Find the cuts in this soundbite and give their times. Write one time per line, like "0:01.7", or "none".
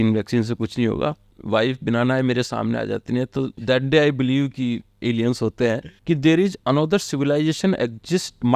0:01.3
0:05.9